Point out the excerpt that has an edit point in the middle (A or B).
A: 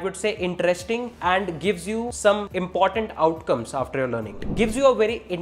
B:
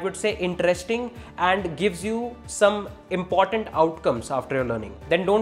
A